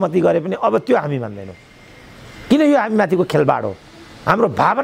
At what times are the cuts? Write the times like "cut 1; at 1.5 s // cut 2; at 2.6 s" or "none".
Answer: none